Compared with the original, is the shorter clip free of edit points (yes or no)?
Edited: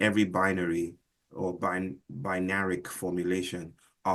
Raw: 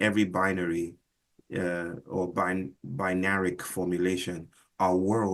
no